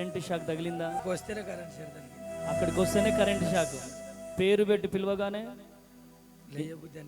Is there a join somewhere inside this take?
yes; 1 cut; at 0.9 s

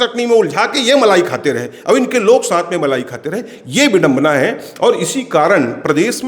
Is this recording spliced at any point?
no; 0 cuts

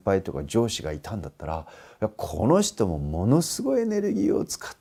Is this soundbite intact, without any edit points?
yes; 0 cuts

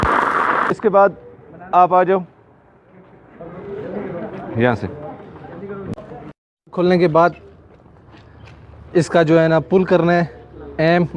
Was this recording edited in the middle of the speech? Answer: yes; 1 cut; at 5.9 s

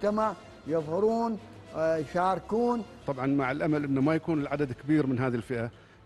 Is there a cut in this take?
yes; 1 cut; at 3.0 s

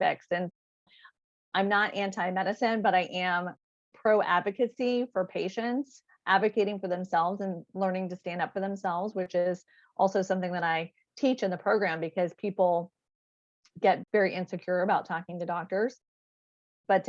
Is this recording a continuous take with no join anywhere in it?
no; 1 cut; at 14.0 s

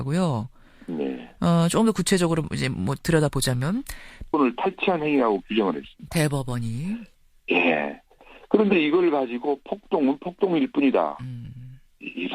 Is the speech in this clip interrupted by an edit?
no; 0 cuts

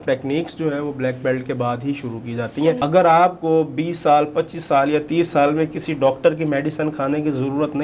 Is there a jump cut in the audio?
yes; 1 cut; at 2.8 s

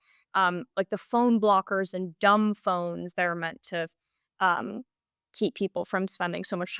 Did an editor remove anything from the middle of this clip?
no; 0 cuts

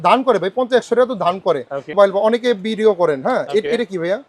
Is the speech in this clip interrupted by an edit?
yes; 1 cut; at 1.9 s

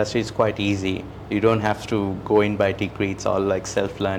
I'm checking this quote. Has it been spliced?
no; 0 cuts

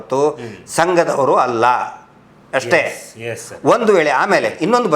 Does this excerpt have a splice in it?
no; 0 cuts

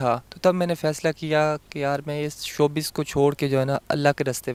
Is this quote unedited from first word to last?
yes; 0 cuts

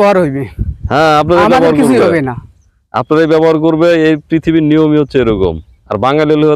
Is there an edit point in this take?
no; 0 cuts

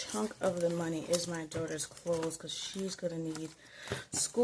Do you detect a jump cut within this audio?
no; 0 cuts

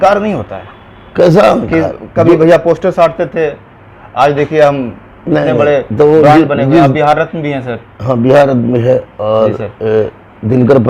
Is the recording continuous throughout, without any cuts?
yes; 0 cuts

